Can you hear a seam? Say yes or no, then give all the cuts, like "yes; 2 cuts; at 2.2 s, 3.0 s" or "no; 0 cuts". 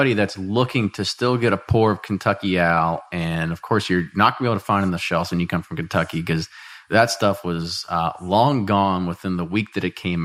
no; 0 cuts